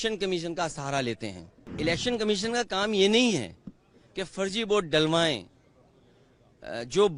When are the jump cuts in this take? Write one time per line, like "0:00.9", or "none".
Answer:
0:01.7